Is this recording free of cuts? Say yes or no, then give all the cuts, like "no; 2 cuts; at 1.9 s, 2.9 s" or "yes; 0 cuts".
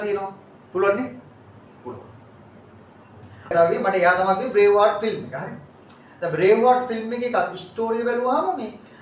no; 1 cut; at 3.5 s